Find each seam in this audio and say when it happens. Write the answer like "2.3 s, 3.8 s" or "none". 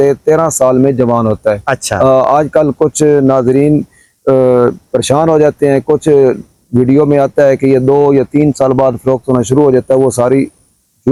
none